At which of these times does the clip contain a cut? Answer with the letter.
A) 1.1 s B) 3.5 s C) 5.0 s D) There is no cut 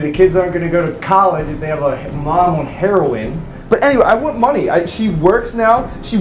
B